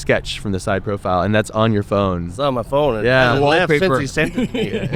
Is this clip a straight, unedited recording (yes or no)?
yes